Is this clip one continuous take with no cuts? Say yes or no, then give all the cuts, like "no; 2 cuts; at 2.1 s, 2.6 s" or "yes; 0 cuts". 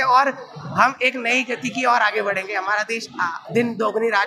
yes; 0 cuts